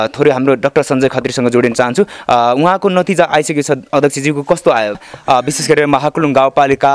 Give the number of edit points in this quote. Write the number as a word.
one